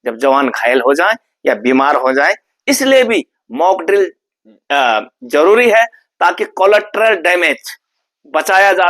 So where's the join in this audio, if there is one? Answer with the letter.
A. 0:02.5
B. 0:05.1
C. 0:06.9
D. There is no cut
A